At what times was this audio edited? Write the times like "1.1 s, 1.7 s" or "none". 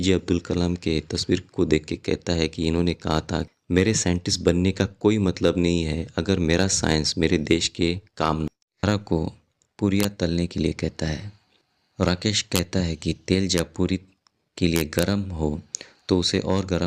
8.5 s

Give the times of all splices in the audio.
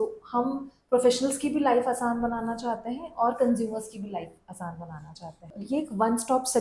5.5 s

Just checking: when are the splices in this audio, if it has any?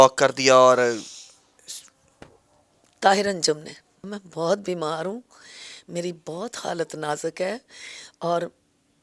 none

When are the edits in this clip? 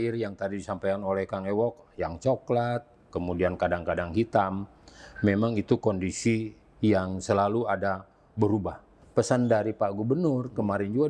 8.9 s

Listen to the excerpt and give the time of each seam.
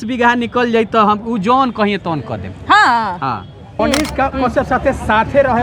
3.7 s

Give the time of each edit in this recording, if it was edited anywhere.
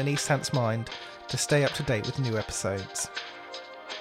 2.9 s

